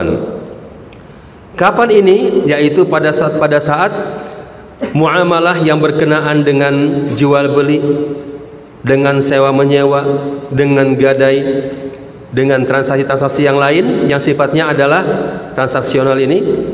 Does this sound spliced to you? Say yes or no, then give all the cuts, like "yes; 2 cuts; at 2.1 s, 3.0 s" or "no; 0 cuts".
no; 0 cuts